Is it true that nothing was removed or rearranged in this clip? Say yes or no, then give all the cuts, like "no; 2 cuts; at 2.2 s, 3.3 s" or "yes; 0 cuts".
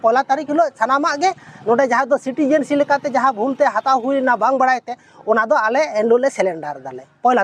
yes; 0 cuts